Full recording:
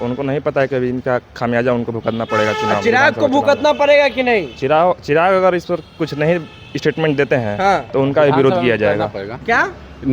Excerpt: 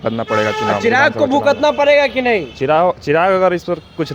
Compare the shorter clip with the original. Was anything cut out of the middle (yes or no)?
no